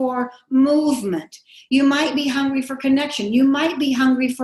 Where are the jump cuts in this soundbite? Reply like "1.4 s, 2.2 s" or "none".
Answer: none

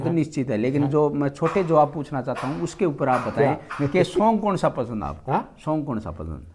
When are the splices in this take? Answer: none

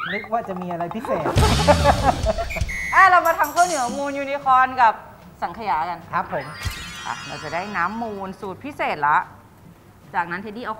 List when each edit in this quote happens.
6.6 s

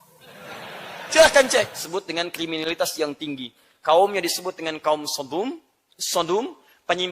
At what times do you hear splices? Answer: 1.8 s

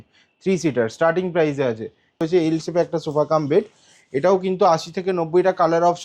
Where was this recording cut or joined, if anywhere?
2.2 s

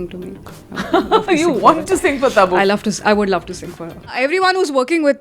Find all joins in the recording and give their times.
4.2 s

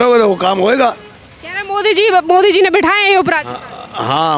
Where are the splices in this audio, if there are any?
none

